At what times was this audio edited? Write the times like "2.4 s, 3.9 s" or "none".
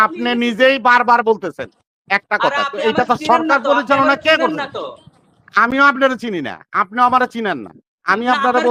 none

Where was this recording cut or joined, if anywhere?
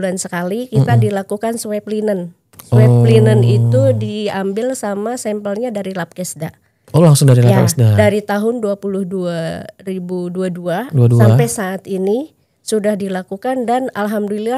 none

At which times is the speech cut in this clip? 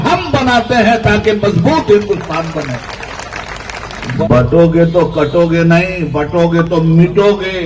4.2 s

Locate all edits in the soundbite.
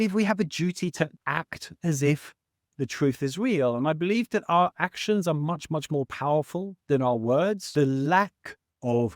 1.2 s, 7.6 s

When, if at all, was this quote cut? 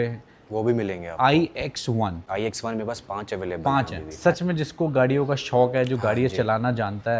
4.1 s

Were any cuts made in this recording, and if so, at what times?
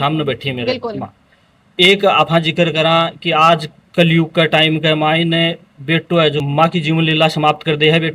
6.4 s

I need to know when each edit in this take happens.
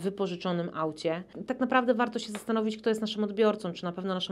1.3 s

